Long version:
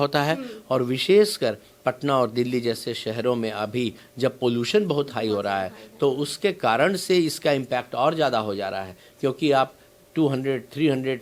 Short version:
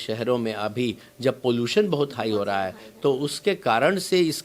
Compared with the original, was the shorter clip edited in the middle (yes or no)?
no